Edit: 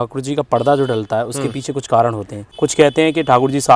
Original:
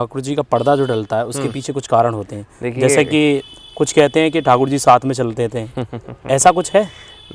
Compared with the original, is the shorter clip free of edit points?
no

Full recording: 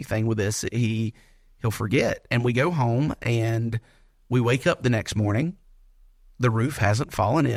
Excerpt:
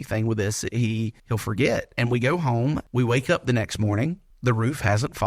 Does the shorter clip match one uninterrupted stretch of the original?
no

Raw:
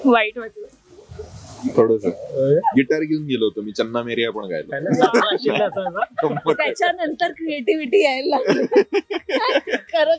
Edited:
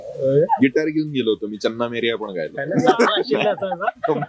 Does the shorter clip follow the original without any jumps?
yes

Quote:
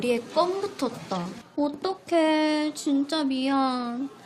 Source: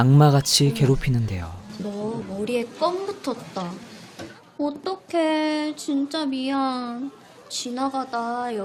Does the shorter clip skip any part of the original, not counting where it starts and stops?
yes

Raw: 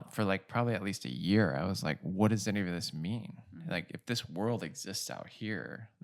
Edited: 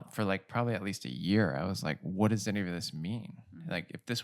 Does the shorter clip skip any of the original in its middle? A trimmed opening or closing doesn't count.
no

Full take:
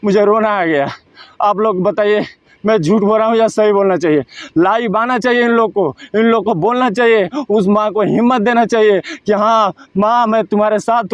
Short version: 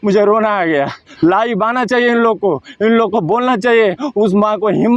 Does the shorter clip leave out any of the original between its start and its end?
yes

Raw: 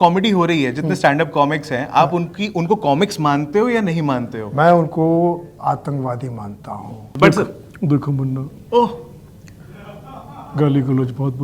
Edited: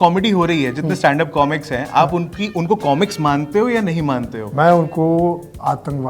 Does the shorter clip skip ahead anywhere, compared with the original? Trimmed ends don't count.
no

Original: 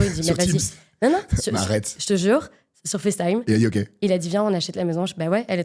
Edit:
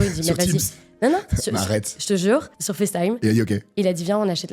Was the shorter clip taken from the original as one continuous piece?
no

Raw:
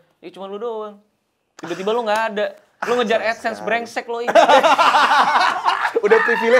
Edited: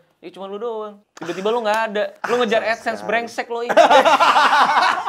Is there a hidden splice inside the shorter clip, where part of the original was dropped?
yes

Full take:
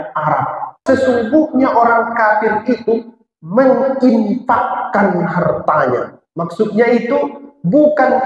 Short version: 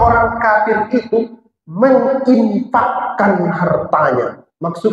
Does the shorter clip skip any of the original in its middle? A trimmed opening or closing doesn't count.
no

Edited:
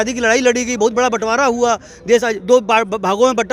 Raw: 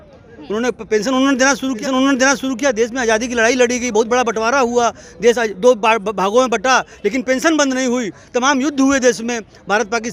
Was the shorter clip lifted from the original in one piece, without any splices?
yes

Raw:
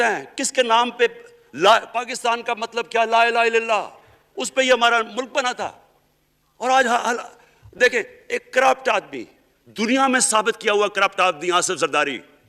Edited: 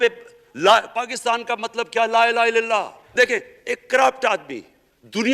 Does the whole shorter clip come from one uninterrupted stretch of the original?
no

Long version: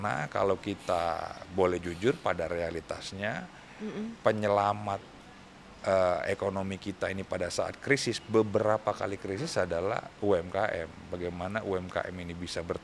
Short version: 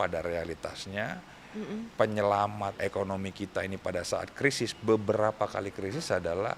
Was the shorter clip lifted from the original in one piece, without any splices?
no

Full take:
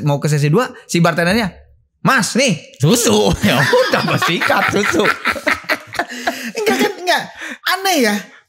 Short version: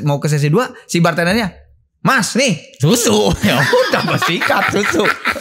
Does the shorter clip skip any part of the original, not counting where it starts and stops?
no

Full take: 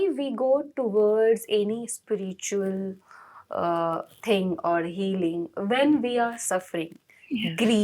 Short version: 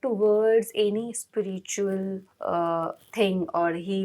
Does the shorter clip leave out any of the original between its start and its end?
yes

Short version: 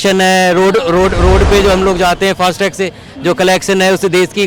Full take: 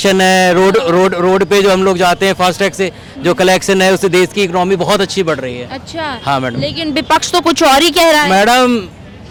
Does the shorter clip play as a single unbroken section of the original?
yes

